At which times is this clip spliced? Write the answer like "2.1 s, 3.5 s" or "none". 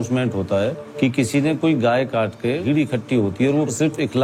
0.8 s, 2.6 s